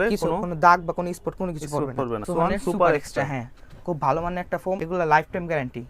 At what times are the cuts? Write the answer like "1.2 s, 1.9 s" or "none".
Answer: 2.2 s, 4.8 s